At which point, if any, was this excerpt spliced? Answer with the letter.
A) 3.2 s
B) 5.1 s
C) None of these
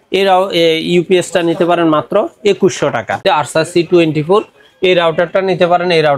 A